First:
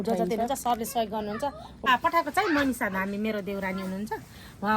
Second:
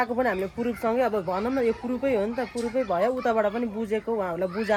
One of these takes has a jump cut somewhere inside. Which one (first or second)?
first